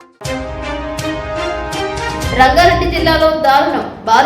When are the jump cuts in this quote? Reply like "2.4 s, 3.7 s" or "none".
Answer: 2.2 s

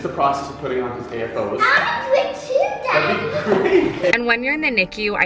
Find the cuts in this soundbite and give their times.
4.1 s

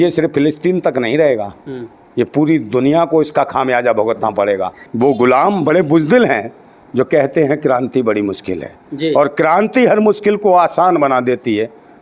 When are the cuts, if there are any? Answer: 4.8 s

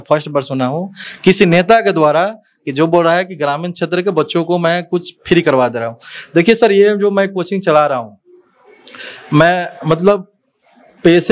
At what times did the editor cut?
none

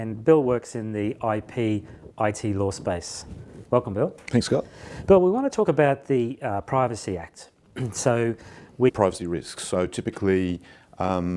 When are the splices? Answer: none

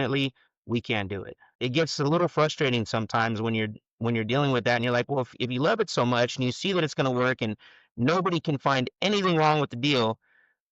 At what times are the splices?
1.5 s

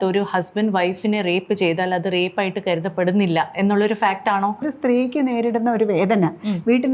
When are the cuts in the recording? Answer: 4.7 s

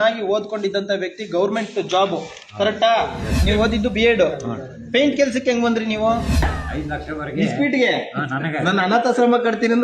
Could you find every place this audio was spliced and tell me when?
3.4 s, 6.4 s

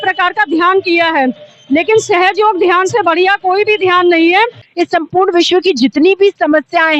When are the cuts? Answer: 4.6 s

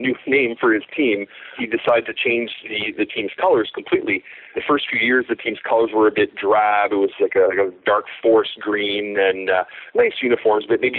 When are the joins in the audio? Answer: 1.5 s, 4.5 s

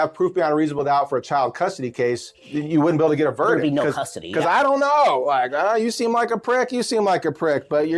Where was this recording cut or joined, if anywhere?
2.4 s

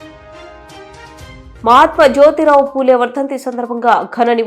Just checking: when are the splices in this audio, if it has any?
1.5 s

